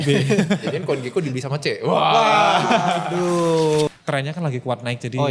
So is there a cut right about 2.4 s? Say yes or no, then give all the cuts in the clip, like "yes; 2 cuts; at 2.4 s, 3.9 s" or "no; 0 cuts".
no; 1 cut; at 3.9 s